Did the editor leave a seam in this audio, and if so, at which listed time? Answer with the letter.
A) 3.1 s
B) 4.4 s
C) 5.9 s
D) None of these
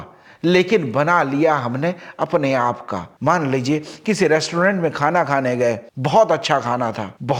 D